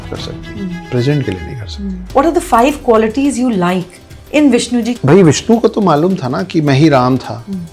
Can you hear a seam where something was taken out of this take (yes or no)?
yes